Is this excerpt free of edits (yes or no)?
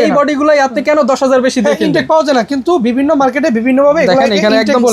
yes